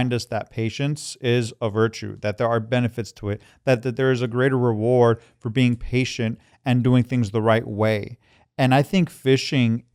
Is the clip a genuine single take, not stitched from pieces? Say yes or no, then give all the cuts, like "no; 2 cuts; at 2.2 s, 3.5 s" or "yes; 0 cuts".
yes; 0 cuts